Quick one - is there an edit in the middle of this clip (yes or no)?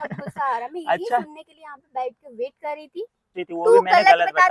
yes